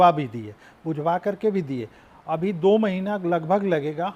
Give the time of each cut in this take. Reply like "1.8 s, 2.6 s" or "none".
none